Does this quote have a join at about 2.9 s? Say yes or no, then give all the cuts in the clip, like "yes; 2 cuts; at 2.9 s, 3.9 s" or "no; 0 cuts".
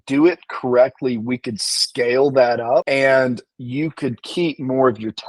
yes; 1 cut; at 2.9 s